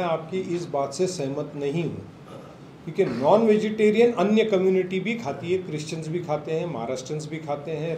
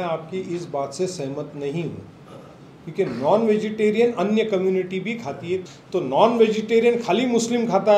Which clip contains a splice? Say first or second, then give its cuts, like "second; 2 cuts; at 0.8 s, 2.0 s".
second; 1 cut; at 5.8 s